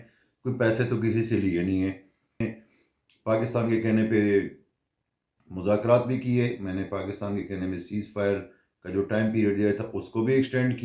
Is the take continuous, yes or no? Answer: no